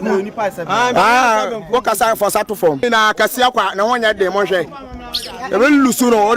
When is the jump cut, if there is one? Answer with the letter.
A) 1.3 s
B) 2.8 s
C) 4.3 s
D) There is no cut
B